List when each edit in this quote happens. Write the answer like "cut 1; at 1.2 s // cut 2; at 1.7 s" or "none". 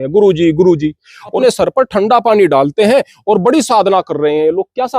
cut 1; at 1.3 s